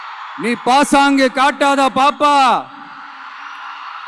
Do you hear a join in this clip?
no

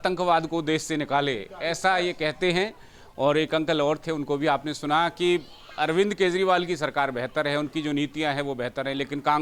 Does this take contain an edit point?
no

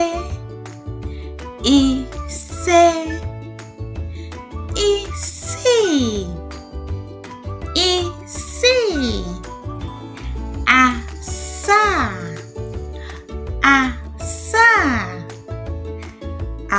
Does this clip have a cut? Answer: no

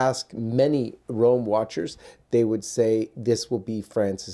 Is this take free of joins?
yes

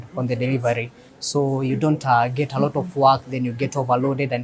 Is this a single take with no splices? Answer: yes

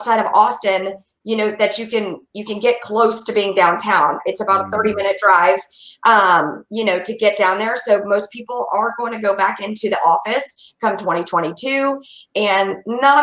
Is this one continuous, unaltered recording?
yes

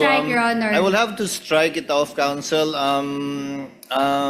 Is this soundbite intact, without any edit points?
yes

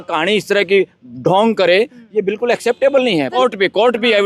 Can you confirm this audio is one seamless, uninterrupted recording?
no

